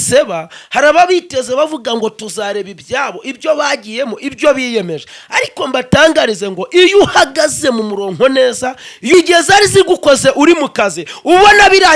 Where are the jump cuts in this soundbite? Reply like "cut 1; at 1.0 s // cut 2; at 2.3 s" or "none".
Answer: cut 1; at 9.1 s